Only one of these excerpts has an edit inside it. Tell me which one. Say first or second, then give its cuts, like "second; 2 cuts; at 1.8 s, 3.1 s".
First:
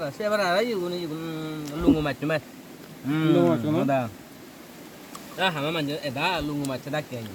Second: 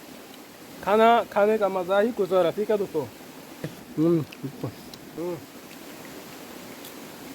second; 2 cuts; at 3.8 s, 5.1 s